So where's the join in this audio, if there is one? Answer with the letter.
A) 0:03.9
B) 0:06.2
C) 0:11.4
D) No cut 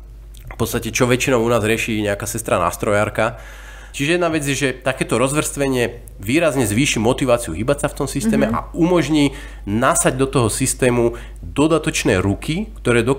A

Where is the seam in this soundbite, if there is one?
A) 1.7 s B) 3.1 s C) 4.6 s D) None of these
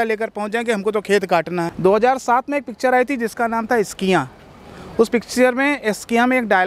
A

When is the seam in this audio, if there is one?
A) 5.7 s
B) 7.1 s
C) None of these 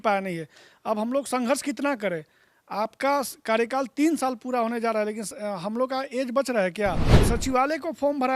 B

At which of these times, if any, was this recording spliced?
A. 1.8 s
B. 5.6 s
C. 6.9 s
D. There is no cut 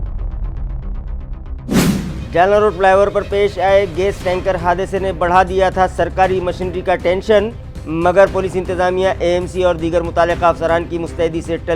A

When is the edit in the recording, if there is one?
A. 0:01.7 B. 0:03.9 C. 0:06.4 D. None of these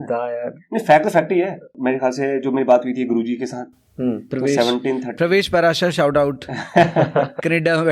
A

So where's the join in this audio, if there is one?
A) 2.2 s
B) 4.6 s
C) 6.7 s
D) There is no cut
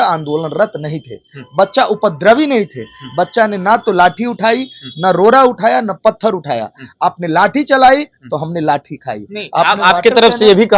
D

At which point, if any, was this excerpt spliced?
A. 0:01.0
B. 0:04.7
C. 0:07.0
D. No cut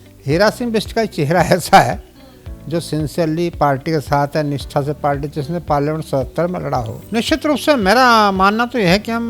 C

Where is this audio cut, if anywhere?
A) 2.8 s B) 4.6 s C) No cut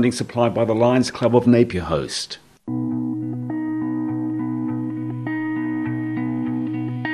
A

